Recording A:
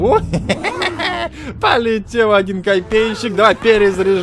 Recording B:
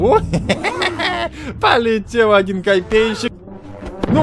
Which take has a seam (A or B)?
B